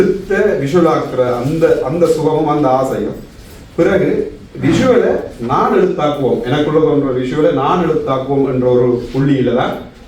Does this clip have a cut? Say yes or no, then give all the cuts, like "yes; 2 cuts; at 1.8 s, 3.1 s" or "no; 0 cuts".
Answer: no; 0 cuts